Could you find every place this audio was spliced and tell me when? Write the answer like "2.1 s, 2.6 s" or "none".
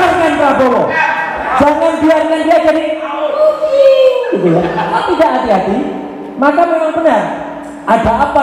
0.9 s, 5.0 s